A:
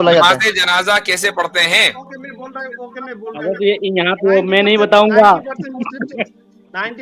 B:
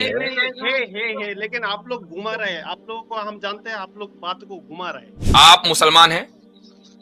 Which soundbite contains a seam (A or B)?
B